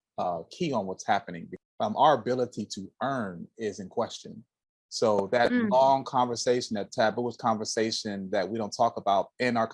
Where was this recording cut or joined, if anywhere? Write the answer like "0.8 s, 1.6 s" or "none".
1.4 s